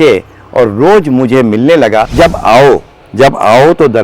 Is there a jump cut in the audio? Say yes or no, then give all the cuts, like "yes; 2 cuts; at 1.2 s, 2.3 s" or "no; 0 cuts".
yes; 1 cut; at 2.1 s